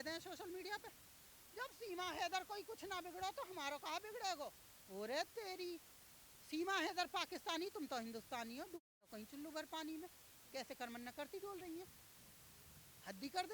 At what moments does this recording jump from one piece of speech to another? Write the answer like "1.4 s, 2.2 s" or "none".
none

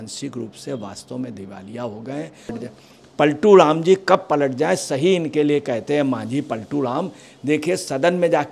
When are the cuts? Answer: 2.6 s

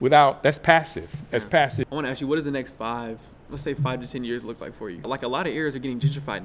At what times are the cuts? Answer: 1.8 s, 5.1 s

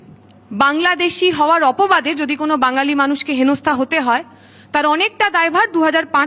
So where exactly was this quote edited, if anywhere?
none

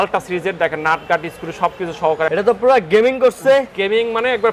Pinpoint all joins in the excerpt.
2.3 s

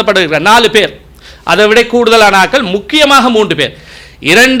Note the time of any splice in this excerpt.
none

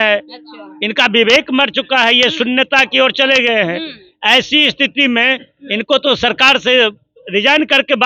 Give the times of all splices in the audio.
none

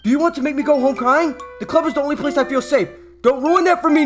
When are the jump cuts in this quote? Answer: none

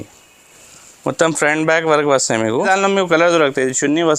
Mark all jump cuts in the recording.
2.6 s

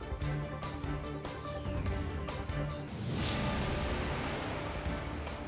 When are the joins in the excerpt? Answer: 1.9 s

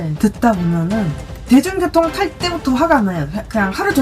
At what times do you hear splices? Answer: 1.4 s

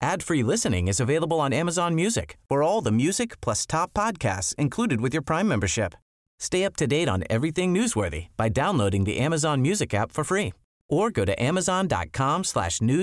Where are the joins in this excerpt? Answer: none

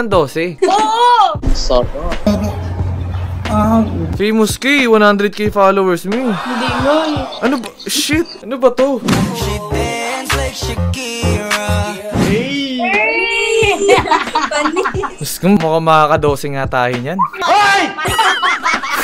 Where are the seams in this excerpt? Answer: 4.1 s, 18.0 s

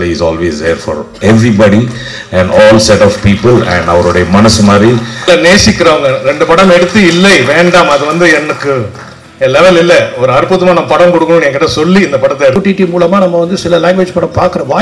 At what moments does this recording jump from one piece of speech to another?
5.3 s, 12.6 s

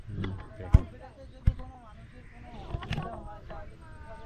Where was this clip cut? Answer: none

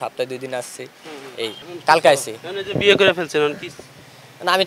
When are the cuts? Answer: 1.6 s

